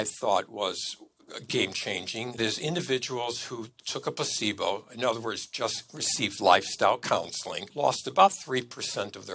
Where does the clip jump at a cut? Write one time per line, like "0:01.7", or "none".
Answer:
0:02.4
0:03.8
0:07.7